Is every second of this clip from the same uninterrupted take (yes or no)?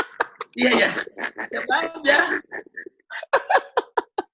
yes